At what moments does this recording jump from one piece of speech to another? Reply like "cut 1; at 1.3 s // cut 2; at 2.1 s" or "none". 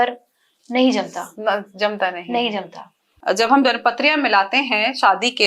cut 1; at 3.1 s